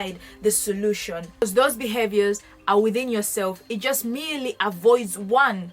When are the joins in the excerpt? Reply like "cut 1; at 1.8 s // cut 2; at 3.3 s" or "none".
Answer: cut 1; at 1.2 s